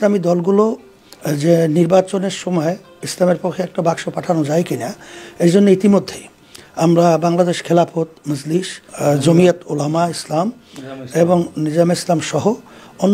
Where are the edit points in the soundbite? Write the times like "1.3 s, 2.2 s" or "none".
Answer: none